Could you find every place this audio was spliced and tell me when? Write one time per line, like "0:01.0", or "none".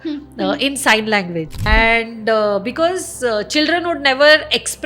0:01.6